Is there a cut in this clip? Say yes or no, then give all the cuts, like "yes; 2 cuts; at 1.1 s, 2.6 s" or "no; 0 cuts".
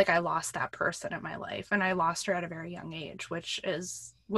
no; 0 cuts